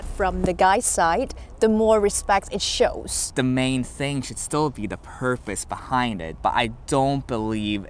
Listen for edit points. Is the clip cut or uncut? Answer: cut